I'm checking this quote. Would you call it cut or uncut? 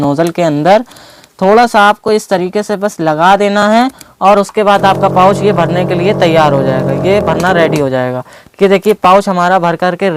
uncut